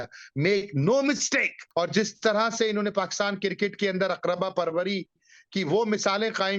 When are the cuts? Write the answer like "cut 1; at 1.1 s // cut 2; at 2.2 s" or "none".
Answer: cut 1; at 1.6 s